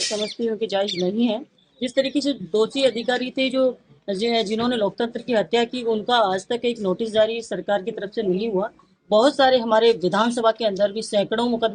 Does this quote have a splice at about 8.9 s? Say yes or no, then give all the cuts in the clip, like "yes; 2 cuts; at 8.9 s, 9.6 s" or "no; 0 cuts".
yes; 2 cuts; at 1.6 s, 8.9 s